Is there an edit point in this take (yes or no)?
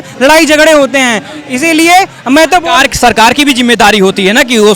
no